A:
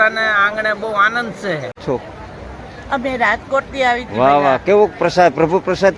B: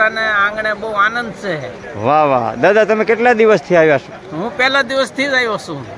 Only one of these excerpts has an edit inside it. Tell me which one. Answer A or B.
A